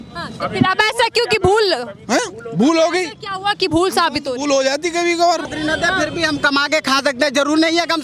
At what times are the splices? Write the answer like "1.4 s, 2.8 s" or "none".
5.5 s